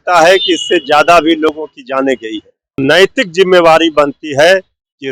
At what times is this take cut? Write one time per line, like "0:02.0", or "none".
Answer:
0:02.8